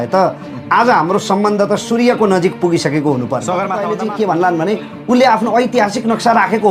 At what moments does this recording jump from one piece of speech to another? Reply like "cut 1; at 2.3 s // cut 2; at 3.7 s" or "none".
cut 1; at 3.7 s